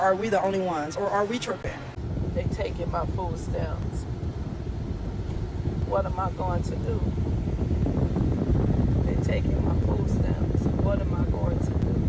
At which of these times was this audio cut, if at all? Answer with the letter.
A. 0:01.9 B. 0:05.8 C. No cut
A